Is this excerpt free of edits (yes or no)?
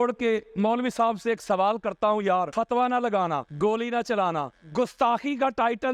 yes